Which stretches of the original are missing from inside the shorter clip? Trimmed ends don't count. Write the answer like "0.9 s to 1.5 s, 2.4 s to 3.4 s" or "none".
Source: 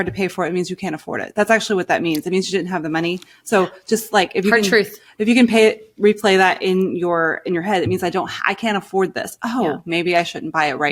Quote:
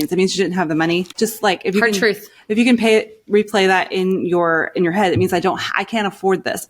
3.2 s to 3.8 s